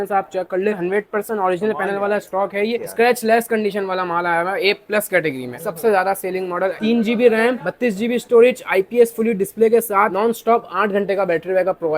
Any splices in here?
yes; 5 cuts; at 0.8 s, 2.8 s, 5.5 s, 6.8 s, 10.1 s

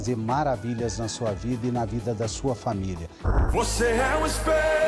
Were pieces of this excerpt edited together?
yes; 1 cut; at 3.2 s

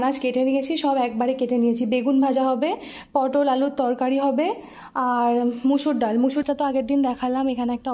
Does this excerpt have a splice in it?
yes; 1 cut; at 6.4 s

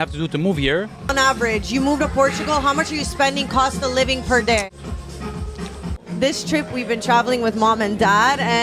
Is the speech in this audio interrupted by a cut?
yes; 3 cuts; at 1.1 s, 4.7 s, 5.9 s

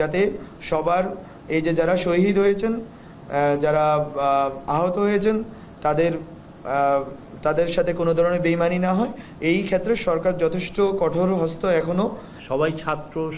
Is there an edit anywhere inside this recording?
no; 0 cuts

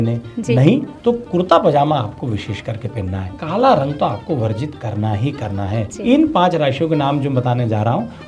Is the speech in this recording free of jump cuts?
no; 2 cuts; at 3.4 s, 5.9 s

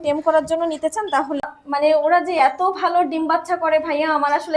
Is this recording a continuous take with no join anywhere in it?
no; 1 cut; at 1.4 s

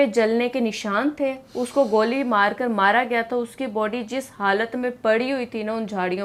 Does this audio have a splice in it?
no; 0 cuts

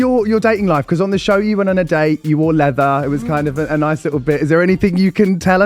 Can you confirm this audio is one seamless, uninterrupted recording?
yes; 0 cuts

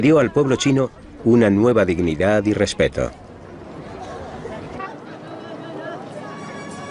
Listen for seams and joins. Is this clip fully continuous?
yes; 0 cuts

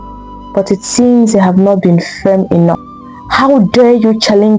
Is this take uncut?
no; 1 cut; at 2.8 s

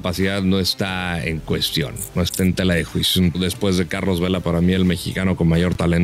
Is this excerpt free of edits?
no; 1 cut; at 3.4 s

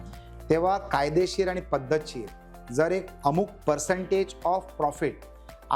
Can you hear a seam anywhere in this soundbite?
no; 0 cuts

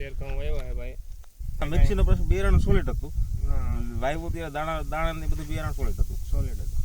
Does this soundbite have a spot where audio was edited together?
yes; 1 cut; at 1.6 s

